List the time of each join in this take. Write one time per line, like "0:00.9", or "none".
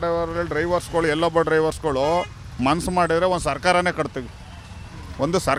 none